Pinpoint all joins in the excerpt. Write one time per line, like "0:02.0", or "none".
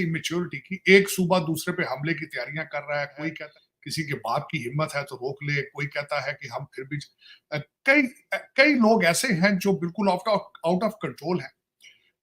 0:03.4